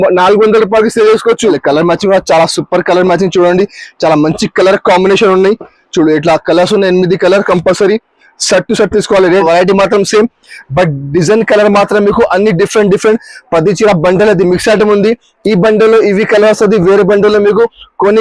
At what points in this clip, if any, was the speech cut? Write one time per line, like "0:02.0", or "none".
0:01.6
0:09.4